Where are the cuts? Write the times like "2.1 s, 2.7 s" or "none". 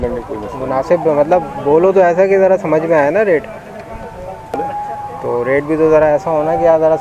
none